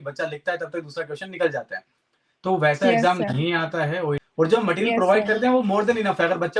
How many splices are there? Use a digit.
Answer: 1